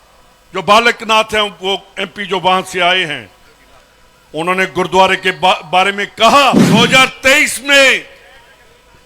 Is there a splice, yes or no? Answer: yes